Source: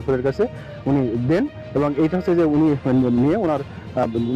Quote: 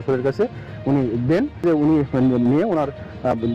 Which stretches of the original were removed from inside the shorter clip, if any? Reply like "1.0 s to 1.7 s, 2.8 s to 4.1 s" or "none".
1.6 s to 2.4 s